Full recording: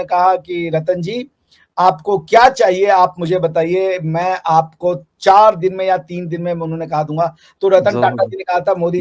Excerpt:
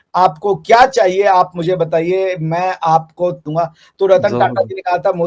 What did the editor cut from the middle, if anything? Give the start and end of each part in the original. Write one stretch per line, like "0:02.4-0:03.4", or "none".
0:05.1-0:07.1